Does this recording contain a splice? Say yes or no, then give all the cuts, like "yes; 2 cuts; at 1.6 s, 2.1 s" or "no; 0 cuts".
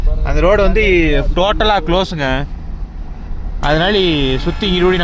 no; 0 cuts